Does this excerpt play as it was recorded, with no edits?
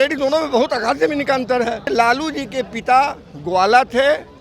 no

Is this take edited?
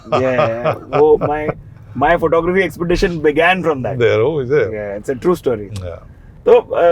no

